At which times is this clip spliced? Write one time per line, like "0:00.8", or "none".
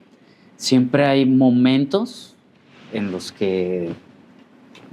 none